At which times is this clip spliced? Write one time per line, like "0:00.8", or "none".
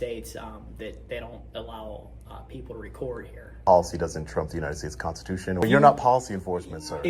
0:03.5
0:05.6